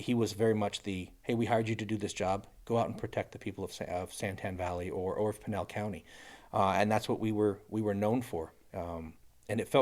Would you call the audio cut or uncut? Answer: uncut